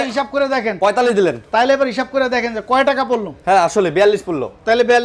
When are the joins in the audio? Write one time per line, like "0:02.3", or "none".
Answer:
none